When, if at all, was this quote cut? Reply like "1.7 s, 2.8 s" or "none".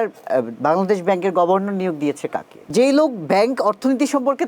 2.7 s